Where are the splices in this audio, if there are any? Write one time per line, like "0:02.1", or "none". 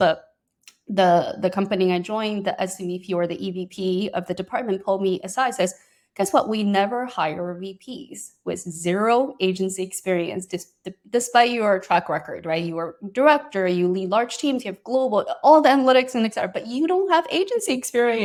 none